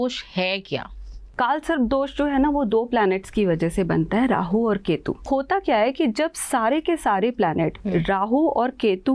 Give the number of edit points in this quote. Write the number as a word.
two